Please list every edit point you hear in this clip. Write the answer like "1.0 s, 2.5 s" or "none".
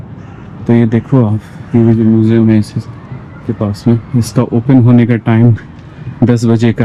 none